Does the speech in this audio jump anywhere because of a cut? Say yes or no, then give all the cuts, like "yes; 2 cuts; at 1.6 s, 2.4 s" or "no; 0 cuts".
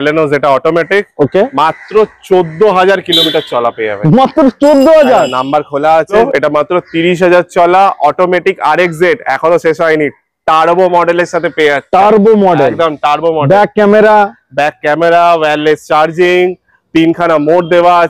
yes; 1 cut; at 6.1 s